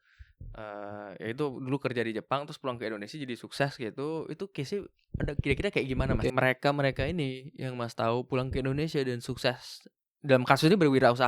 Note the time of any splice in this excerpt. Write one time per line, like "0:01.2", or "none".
0:06.3